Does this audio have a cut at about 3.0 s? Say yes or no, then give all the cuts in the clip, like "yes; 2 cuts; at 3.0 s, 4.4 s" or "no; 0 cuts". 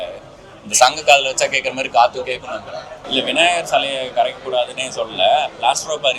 yes; 1 cut; at 3.0 s